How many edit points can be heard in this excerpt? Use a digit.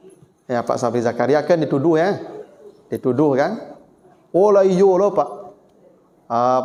0